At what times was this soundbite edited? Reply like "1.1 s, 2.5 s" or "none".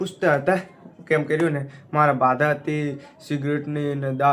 none